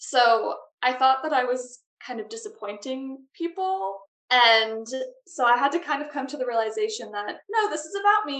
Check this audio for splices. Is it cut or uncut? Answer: uncut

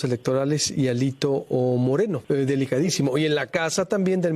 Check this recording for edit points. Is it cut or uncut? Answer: cut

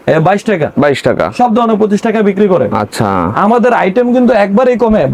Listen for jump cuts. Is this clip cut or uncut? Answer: uncut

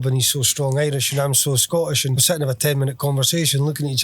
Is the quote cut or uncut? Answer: cut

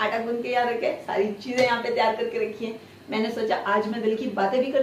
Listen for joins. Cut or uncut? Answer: uncut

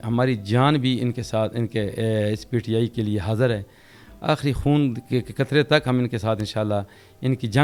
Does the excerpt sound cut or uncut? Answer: uncut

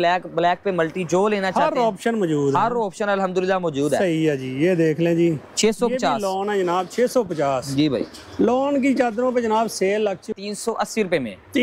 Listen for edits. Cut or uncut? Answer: cut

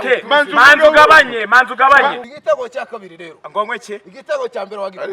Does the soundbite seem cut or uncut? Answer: cut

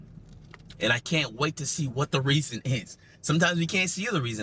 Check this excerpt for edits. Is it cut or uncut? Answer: uncut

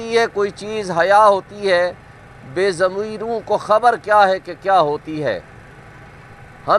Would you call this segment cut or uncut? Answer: uncut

